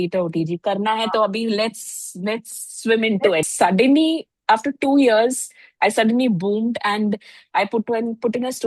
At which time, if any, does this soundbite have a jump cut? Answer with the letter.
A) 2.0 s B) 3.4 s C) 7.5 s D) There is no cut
B